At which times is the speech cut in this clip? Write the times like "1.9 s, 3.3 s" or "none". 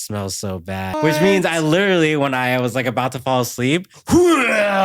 0.9 s, 3.9 s